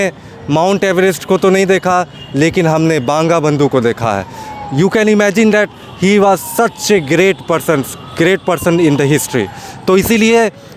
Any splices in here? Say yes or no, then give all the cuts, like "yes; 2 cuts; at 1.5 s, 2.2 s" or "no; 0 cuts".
no; 0 cuts